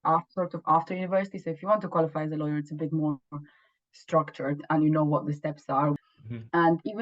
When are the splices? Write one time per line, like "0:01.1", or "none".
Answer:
0:05.9

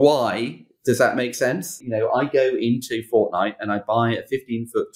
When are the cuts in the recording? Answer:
0:01.8

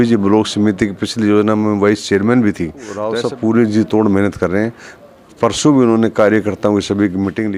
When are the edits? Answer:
0:03.0

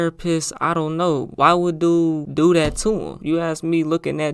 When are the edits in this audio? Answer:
0:03.2

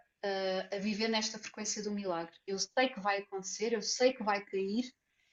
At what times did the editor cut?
none

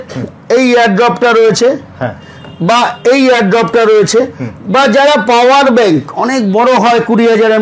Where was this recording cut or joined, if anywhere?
none

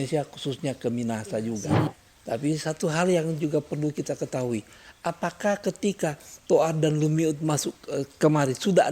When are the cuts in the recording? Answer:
0:01.9

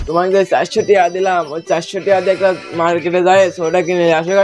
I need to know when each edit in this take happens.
none

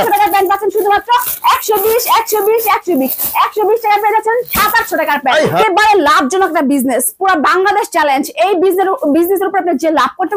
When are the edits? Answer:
0:05.6

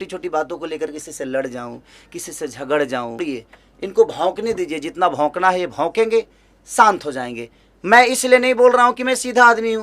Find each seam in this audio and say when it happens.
0:03.2

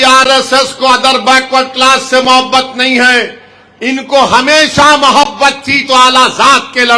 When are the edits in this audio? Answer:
none

